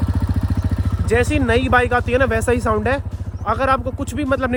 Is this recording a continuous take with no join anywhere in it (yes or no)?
yes